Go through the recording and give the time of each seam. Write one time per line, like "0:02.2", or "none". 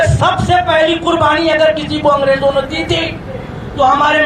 none